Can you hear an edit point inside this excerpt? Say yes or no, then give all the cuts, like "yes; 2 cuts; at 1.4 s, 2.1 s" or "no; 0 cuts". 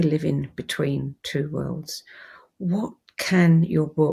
no; 0 cuts